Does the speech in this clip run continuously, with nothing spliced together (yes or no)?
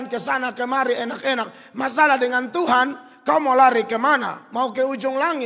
yes